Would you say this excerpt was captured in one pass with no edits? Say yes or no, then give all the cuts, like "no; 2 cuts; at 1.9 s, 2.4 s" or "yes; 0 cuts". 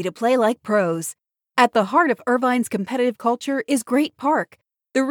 yes; 0 cuts